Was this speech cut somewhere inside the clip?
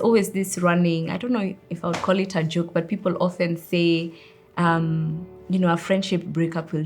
yes; 1 cut; at 5.3 s

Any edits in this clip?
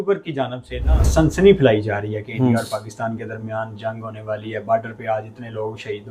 yes; 1 cut; at 1.1 s

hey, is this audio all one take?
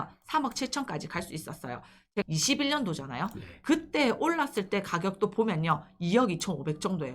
no; 1 cut; at 2.2 s

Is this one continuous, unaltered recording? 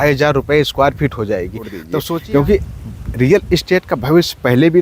no; 1 cut; at 2.0 s

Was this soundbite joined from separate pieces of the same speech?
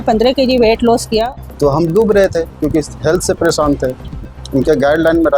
yes; 2 cuts; at 1.3 s, 4.4 s

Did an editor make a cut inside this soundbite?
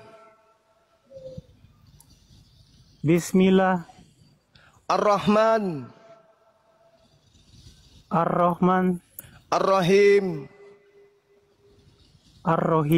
no; 0 cuts

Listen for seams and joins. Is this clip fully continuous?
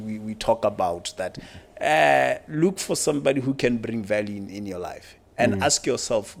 yes; 0 cuts

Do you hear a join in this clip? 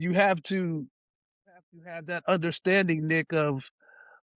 no; 0 cuts

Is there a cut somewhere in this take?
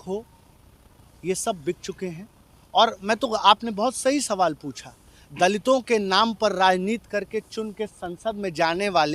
no; 0 cuts

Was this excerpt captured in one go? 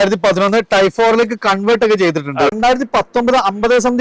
no; 1 cut; at 2.5 s

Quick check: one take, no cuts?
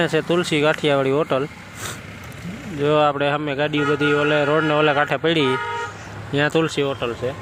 yes; 0 cuts

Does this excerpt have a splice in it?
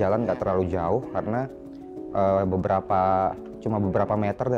no; 0 cuts

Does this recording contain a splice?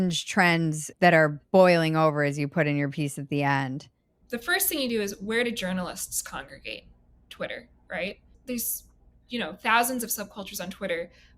yes; 3 cuts; at 0.9 s, 4.2 s, 8.3 s

